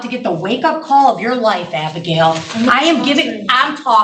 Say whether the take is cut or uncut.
uncut